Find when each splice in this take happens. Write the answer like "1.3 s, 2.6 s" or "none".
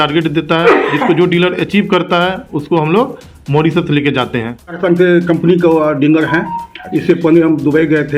4.8 s